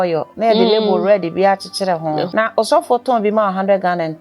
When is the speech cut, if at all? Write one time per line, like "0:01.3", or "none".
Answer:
0:02.3